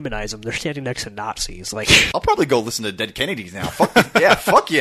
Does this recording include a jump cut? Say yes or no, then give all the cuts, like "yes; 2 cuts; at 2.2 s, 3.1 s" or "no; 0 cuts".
yes; 1 cut; at 2.1 s